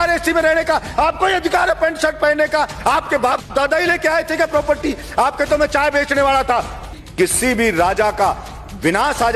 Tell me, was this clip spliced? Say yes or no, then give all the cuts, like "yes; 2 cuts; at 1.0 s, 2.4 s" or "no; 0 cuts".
yes; 1 cut; at 7.0 s